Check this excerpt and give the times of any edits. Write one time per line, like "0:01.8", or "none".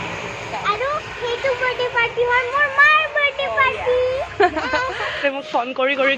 0:05.2